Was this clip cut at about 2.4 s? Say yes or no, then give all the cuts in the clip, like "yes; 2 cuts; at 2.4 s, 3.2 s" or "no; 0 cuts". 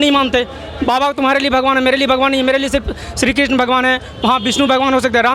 no; 0 cuts